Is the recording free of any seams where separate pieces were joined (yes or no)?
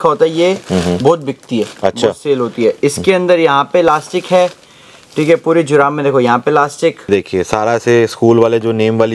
no